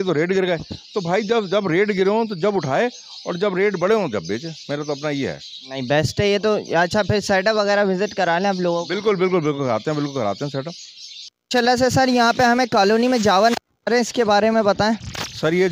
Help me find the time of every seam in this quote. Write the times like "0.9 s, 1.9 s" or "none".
none